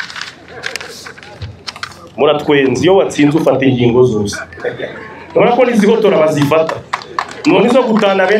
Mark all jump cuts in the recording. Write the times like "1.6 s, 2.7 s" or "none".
none

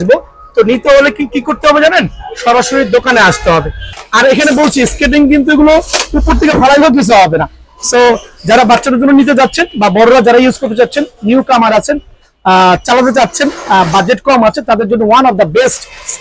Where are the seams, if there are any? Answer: 4.0 s

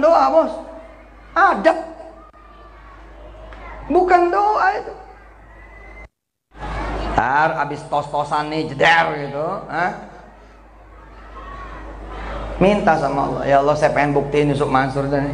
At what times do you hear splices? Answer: 6.6 s

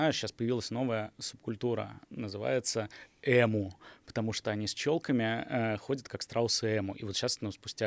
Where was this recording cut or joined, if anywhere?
none

